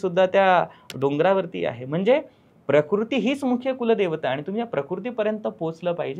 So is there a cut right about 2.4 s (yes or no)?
no